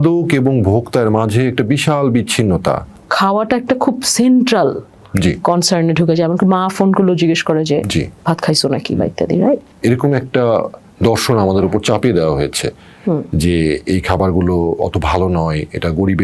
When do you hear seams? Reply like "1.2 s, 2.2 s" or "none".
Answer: 2.9 s, 9.7 s